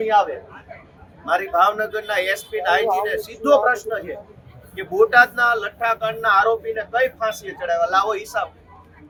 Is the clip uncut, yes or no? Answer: yes